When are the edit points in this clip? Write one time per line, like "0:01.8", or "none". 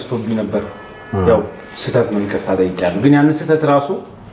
none

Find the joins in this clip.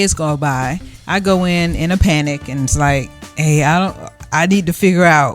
0:00.9

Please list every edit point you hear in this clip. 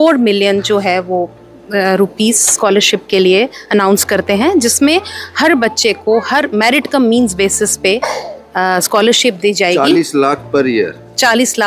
none

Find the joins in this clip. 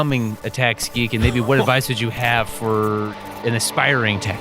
0:03.4

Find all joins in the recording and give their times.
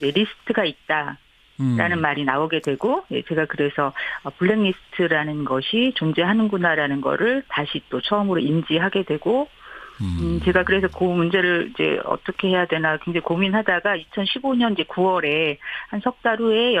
0:07.6

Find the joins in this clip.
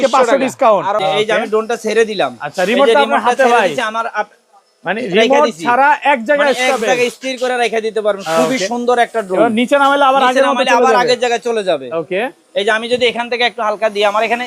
0:01.0

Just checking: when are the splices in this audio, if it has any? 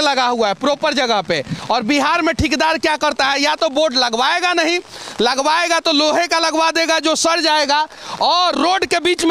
none

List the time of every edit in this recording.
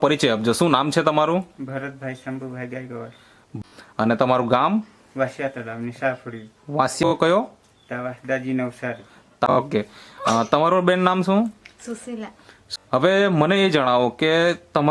0:03.5
0:07.0
0:09.5
0:12.5

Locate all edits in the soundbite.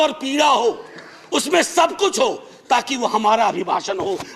none

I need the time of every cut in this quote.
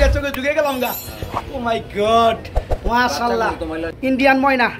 0:03.9

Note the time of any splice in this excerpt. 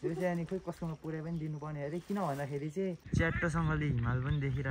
0:03.0

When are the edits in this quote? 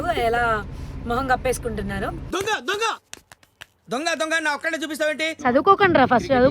0:05.3

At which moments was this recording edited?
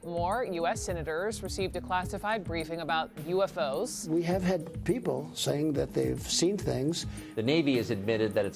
0:04.0
0:07.2

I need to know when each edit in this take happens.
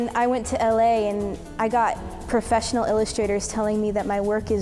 none

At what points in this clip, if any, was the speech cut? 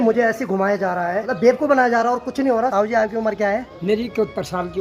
0:01.2
0:02.7
0:03.7

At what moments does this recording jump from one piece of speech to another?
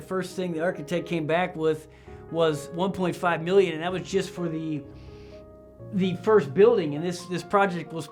none

